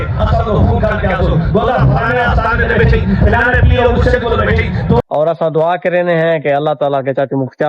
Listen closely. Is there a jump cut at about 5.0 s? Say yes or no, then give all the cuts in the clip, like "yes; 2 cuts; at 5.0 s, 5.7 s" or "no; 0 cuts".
yes; 1 cut; at 5.0 s